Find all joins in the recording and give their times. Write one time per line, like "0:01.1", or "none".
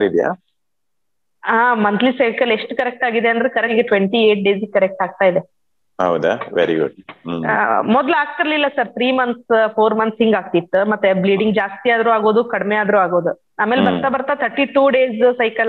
0:03.7